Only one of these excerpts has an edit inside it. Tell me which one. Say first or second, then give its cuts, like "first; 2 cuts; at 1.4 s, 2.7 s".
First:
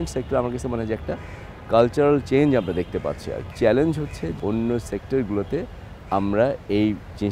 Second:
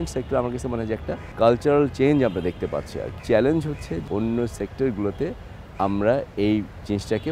second; 1 cut; at 1.2 s